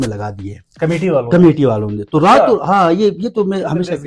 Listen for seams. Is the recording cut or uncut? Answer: uncut